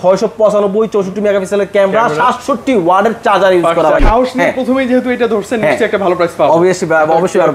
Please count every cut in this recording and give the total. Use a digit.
1